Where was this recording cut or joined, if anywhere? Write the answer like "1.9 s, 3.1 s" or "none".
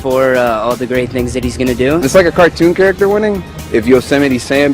2.0 s, 3.5 s